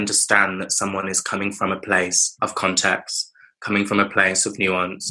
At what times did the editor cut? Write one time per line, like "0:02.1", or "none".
0:02.2